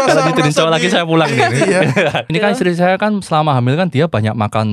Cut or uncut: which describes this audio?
cut